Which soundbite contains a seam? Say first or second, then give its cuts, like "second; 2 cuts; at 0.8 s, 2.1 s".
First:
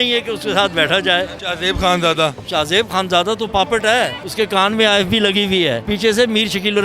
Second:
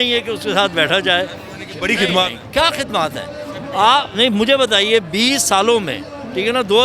first; 3 cuts; at 1.4 s, 4.2 s, 5.8 s